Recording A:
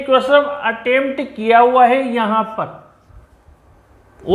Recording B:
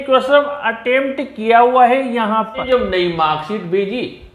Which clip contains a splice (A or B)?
B